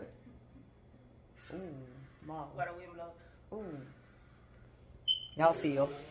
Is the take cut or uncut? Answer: uncut